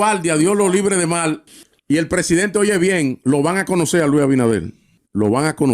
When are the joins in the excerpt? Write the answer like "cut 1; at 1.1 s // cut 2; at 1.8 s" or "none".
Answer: cut 1; at 1.6 s